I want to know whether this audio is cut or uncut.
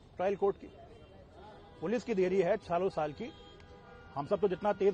uncut